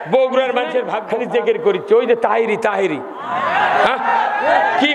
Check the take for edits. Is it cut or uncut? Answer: cut